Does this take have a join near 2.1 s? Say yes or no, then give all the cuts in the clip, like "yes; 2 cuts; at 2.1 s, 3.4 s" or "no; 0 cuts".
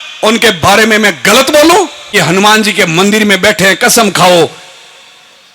yes; 1 cut; at 2.1 s